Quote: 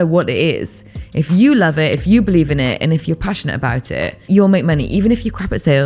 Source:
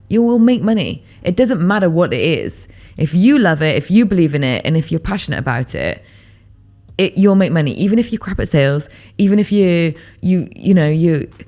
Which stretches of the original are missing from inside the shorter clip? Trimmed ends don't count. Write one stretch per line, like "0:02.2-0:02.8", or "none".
0:06.1-0:07.1